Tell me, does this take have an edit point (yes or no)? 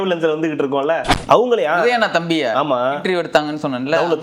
yes